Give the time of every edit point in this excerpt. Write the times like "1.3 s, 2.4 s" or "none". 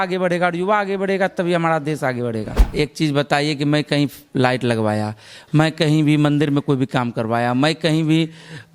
2.6 s